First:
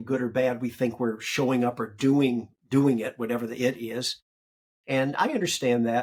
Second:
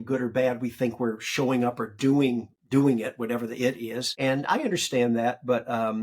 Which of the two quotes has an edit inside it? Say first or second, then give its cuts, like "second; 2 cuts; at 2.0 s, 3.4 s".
second; 1 cut; at 4.0 s